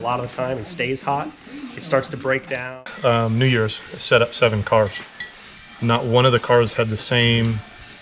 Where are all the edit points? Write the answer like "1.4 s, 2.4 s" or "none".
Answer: 2.6 s